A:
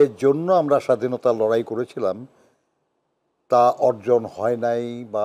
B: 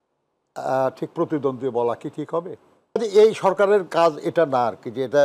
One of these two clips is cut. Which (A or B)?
B